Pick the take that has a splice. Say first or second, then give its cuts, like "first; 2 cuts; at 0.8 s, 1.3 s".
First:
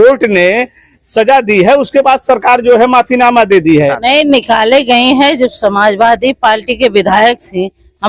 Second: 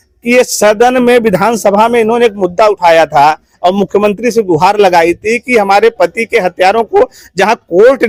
first; 1 cut; at 4.0 s